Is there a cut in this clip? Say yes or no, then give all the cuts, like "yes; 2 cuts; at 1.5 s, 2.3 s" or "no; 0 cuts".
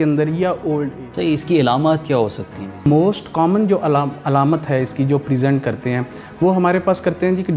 yes; 2 cuts; at 0.9 s, 2.9 s